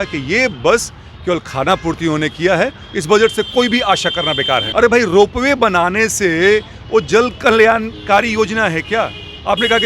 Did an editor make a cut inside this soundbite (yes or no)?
yes